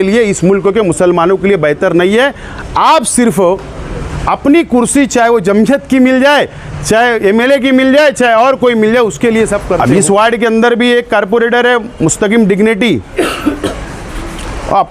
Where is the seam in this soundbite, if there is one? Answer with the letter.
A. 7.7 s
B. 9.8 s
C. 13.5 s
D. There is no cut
B